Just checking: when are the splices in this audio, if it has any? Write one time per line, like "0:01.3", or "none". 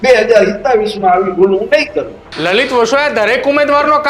0:02.2